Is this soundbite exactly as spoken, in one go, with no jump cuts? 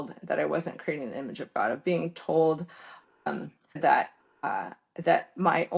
no; 1 cut; at 3.8 s

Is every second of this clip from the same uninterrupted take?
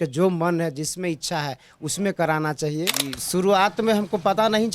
no; 1 cut; at 3.1 s

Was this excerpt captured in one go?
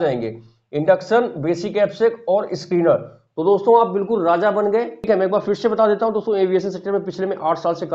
no; 1 cut; at 5.0 s

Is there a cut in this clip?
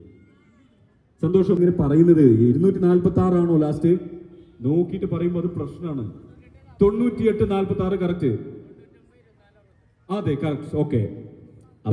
yes; 1 cut; at 1.6 s

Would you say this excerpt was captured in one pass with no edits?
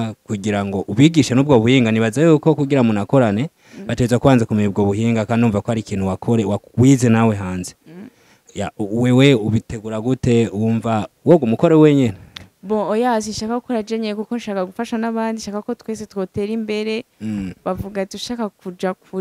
yes; 0 cuts

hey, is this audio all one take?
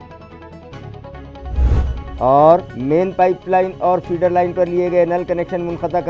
yes; 0 cuts

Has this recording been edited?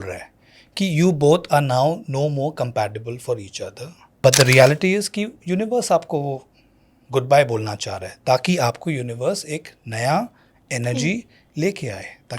yes; 1 cut; at 4.1 s

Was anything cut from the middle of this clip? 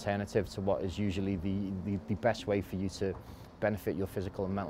no; 0 cuts

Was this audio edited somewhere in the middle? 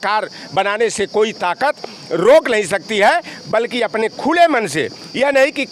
no; 0 cuts

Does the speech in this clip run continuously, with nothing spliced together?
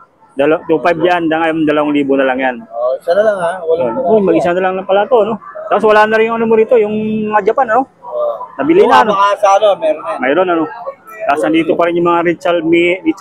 yes; 0 cuts

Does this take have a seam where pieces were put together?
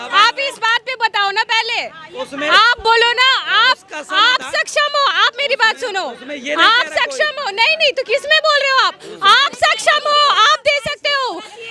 no; 0 cuts

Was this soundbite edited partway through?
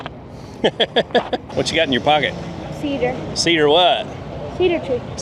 yes; 1 cut; at 1.5 s

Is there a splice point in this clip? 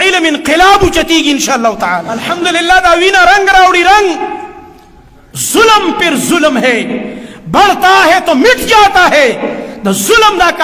yes; 1 cut; at 2.2 s

